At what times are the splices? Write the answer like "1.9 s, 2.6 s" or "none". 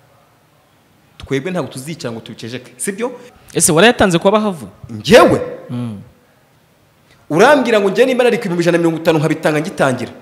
3.3 s